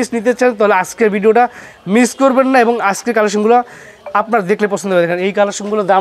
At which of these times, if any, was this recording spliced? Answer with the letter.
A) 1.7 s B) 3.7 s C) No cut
C